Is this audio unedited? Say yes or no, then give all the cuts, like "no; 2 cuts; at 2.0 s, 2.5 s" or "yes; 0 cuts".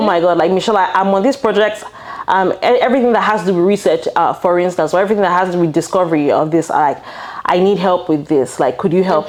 yes; 0 cuts